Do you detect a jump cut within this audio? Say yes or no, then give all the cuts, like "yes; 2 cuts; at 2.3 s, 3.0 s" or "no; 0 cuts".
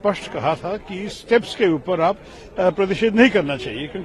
no; 0 cuts